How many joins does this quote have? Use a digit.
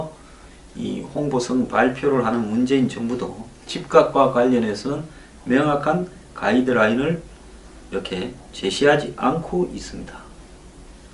1